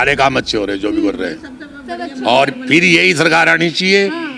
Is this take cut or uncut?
uncut